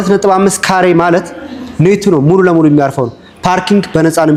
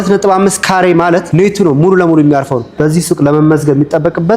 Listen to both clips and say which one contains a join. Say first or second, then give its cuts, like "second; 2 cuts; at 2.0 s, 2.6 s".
second; 2 cuts; at 1.3 s, 2.7 s